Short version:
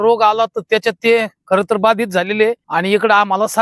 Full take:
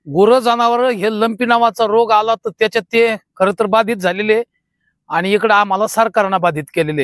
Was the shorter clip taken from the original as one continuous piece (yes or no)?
no